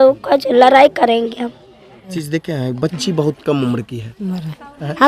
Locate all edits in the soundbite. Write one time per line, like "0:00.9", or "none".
0:02.1